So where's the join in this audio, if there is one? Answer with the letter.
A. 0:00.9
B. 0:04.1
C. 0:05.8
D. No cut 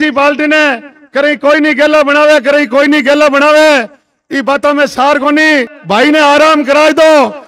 C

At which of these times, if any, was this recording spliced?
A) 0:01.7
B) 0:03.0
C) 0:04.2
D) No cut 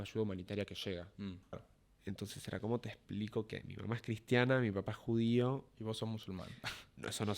A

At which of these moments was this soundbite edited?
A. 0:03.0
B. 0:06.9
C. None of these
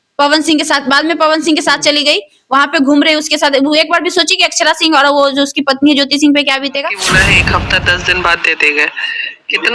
B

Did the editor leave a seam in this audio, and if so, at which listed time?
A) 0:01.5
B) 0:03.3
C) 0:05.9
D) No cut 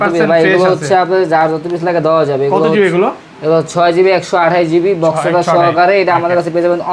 D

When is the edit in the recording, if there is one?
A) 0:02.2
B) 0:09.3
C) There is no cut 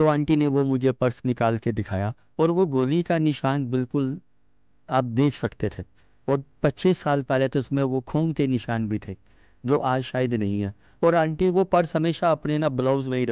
A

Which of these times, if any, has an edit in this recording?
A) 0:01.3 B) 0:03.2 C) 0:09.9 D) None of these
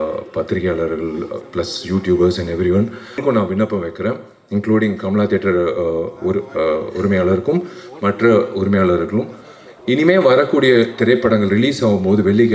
B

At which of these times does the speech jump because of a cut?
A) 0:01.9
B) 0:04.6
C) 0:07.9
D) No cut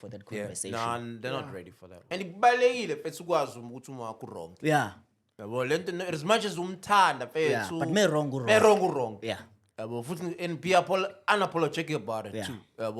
A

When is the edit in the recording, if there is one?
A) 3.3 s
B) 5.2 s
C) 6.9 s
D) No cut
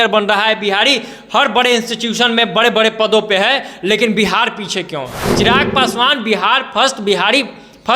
B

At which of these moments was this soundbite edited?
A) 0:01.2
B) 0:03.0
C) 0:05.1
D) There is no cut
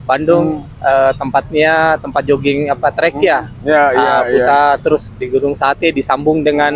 D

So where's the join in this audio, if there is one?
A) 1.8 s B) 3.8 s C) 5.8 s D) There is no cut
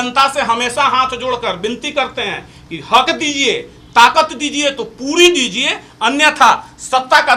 D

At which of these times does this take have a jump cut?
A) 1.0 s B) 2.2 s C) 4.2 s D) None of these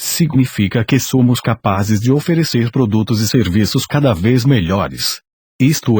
A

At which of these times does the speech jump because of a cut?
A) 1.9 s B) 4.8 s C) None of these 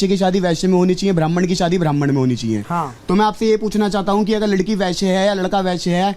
A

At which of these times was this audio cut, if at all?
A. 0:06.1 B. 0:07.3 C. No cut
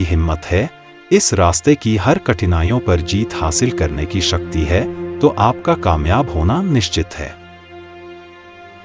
B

